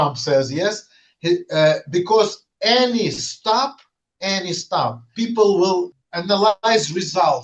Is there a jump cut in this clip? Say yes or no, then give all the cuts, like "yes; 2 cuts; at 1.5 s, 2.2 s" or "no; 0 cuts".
yes; 2 cuts; at 5.0 s, 5.9 s